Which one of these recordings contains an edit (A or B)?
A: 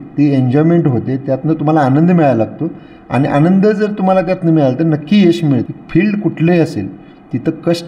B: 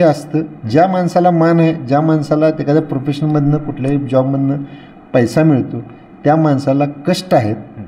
A